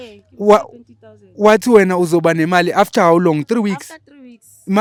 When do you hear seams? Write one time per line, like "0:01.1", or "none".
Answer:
none

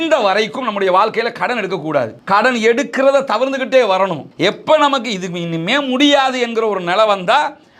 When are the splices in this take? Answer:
none

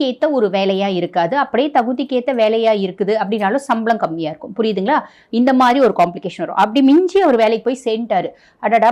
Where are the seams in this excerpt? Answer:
none

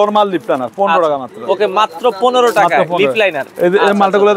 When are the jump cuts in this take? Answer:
none

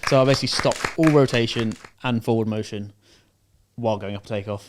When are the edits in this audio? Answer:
none

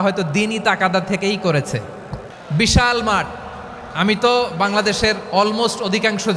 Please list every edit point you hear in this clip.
0:02.4

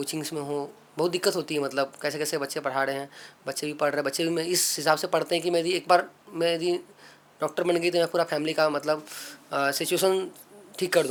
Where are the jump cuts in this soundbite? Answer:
none

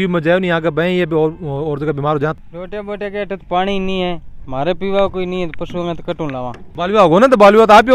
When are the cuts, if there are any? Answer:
0:02.3
0:06.6

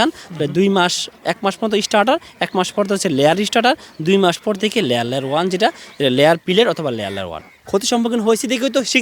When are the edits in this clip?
0:07.5

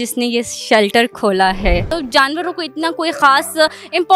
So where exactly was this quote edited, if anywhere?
0:01.9

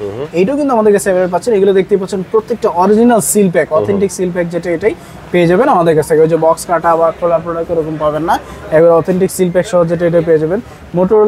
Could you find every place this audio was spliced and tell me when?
none

